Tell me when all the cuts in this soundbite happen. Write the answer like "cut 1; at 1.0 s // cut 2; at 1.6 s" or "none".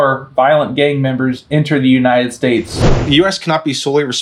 cut 1; at 2.8 s

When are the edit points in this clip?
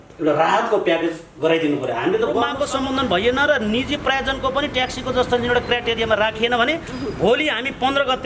cut 1; at 2.5 s

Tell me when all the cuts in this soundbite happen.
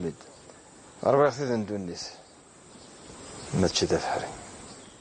cut 1; at 1.3 s

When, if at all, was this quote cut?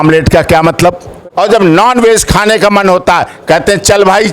cut 1; at 1.1 s

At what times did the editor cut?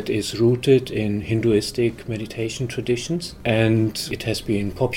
cut 1; at 3.3 s // cut 2; at 4.1 s

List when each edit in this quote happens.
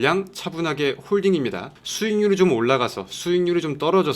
cut 1; at 1.8 s

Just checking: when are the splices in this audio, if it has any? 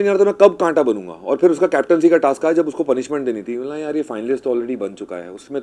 none

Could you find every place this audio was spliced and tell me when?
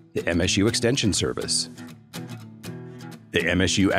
cut 1; at 1.5 s // cut 2; at 3.1 s

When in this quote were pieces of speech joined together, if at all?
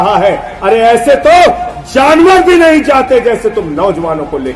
none

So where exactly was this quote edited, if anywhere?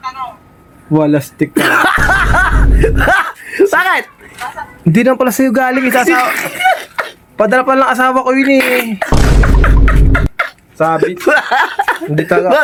none

